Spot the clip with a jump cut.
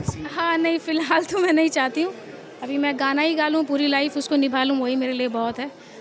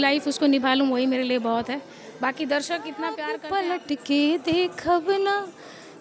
second; 1 cut; at 3.3 s

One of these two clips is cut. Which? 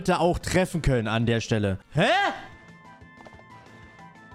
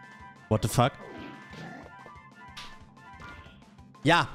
first; 1 cut; at 1.8 s

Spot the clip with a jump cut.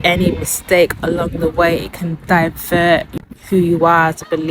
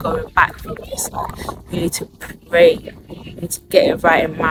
first; 1 cut; at 3.1 s

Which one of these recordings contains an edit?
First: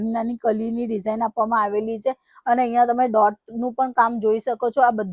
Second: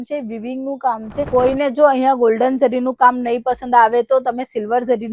second; 1 cut; at 1.3 s

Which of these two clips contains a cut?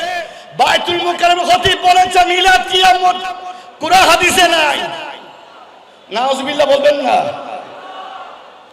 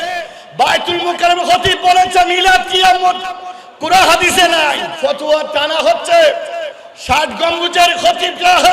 second; 1 cut; at 4.9 s

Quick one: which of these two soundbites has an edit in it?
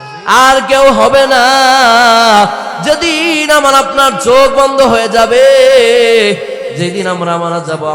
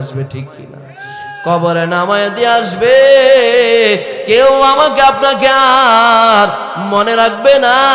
first; 1 cut; at 2.7 s

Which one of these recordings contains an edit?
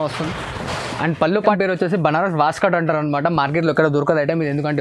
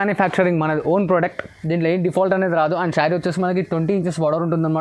first; 1 cut; at 1.4 s

